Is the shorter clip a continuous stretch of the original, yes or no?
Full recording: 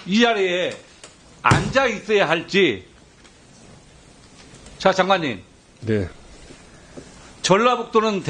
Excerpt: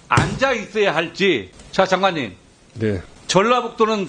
no